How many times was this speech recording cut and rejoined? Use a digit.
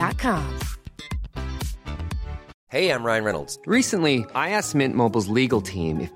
1